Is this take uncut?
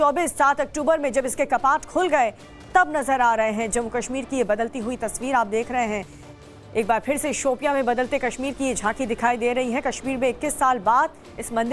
no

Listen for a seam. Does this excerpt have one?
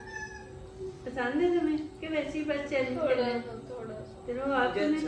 no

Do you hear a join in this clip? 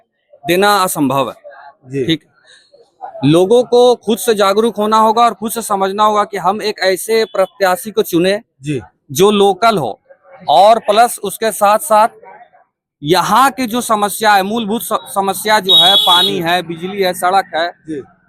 no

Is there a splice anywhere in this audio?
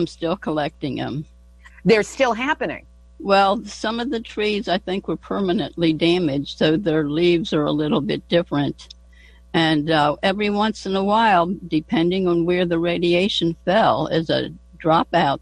no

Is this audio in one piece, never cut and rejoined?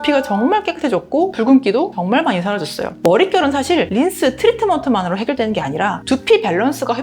no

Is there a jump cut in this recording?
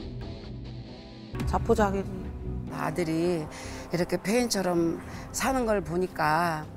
yes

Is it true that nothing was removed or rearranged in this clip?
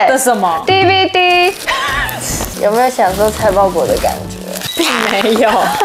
no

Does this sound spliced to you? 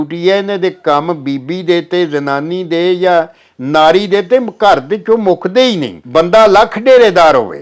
yes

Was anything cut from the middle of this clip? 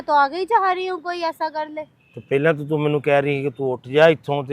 no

